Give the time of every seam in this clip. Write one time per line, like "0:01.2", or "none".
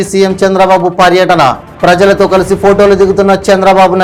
none